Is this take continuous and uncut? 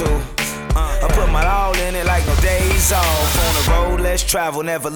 yes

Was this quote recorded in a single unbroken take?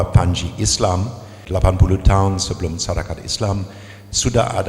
no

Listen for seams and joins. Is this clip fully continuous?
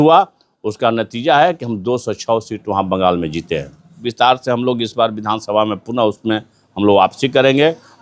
no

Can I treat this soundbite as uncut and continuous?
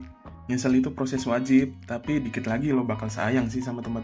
yes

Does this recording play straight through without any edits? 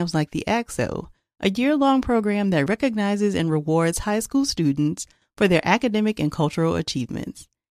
yes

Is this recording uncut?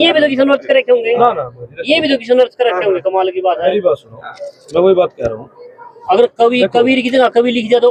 yes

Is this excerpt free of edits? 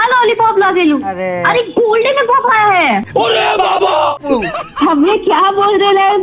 no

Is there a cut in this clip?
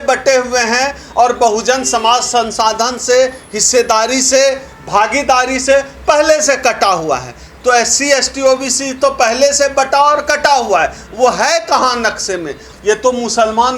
yes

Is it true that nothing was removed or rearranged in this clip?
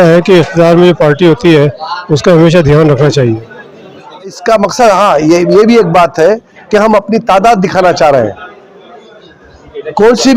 no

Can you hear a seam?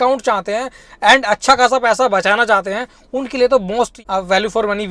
yes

